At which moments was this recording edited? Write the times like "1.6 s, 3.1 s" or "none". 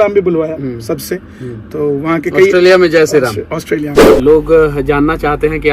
4.0 s